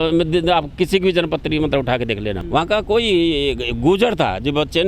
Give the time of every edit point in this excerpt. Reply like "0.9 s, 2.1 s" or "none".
2.4 s